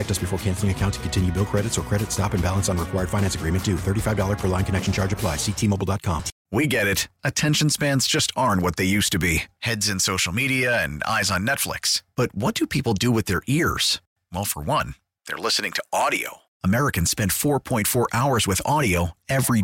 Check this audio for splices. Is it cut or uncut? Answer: cut